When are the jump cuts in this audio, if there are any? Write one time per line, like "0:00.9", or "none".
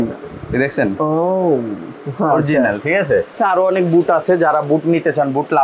0:03.3